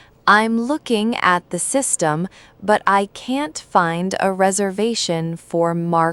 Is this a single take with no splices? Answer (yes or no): yes